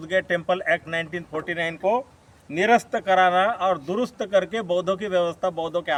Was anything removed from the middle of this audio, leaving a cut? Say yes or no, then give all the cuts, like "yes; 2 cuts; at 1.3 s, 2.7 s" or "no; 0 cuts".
no; 0 cuts